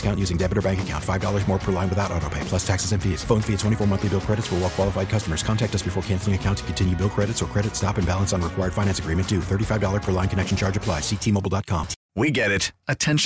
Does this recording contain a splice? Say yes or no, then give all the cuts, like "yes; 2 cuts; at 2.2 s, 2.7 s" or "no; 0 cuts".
yes; 1 cut; at 12.0 s